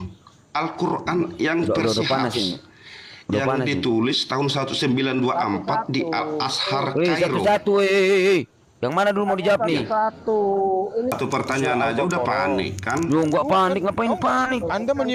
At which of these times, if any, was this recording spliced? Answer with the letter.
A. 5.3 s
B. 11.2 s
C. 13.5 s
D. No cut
B